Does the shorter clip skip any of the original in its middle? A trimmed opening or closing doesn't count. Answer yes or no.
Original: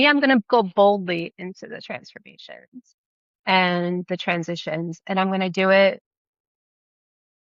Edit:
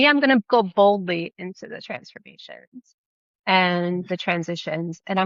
no